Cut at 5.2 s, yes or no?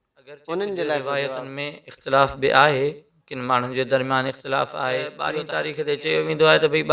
yes